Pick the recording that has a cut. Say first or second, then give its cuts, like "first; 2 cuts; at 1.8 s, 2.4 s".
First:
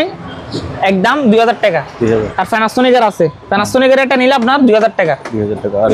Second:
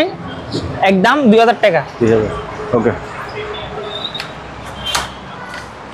first; 1 cut; at 2.3 s